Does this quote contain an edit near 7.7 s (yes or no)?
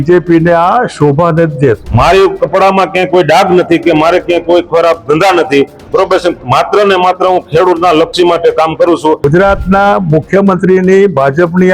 no